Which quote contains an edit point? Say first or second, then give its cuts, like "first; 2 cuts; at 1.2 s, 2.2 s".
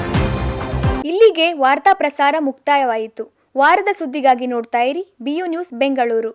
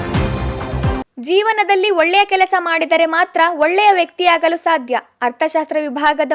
second; 1 cut; at 1.0 s